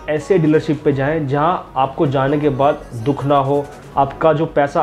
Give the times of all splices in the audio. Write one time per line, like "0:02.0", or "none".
none